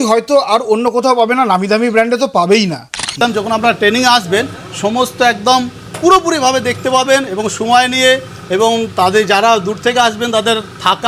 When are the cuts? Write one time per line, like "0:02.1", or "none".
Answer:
0:03.2